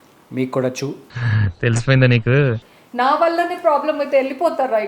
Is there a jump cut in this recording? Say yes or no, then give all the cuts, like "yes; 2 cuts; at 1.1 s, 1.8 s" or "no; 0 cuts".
yes; 1 cut; at 2.7 s